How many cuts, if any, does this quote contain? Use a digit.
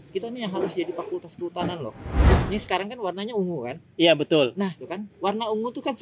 2